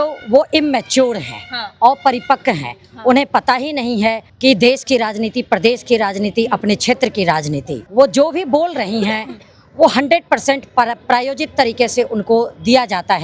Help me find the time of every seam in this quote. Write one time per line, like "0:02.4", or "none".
0:04.3
0:07.8